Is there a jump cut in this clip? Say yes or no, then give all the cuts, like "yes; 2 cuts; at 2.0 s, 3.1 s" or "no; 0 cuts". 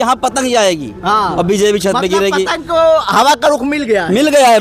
no; 0 cuts